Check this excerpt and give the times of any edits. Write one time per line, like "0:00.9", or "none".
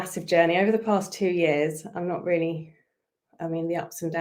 none